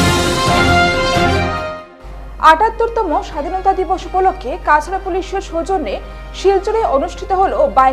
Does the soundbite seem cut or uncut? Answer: cut